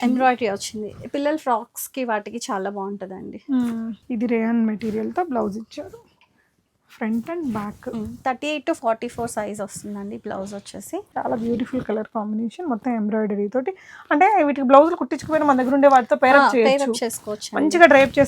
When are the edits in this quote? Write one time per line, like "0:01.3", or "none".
0:04.0
0:11.1